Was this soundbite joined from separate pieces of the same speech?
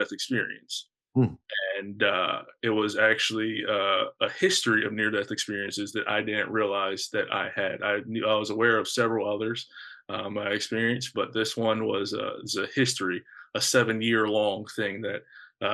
no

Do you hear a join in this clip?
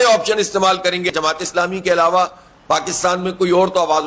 yes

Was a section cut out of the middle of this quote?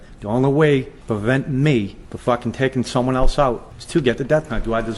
yes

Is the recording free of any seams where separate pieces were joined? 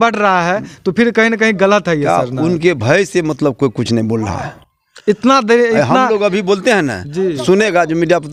yes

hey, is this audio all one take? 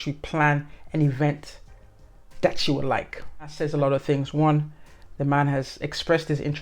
no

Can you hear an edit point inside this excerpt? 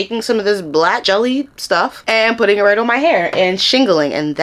no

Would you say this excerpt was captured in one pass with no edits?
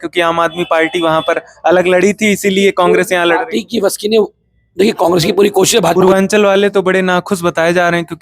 no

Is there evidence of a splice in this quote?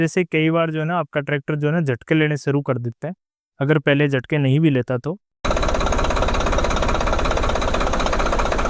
yes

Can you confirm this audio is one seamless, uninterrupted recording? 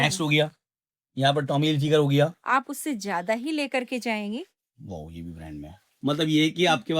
no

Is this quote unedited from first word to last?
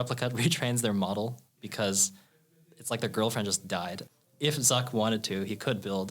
no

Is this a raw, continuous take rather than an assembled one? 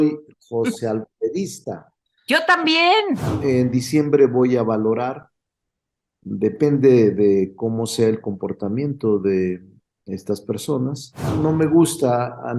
no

